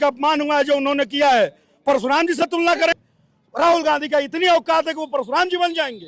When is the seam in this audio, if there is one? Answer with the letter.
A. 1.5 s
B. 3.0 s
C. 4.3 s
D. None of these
B